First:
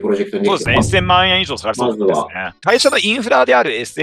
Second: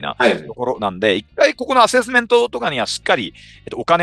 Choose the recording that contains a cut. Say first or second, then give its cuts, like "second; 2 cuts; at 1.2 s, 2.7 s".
first; 1 cut; at 2.5 s